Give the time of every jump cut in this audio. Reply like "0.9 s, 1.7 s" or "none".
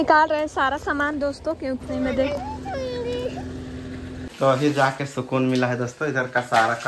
1.8 s, 4.2 s